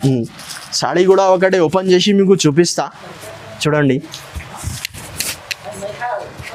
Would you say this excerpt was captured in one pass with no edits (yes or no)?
yes